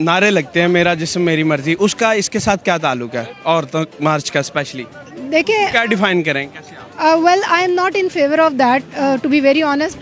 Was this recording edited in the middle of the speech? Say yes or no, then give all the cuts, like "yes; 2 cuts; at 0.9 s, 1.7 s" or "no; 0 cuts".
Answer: no; 0 cuts